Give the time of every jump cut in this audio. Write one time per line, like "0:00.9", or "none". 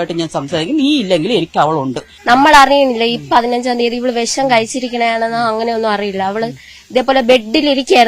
0:02.1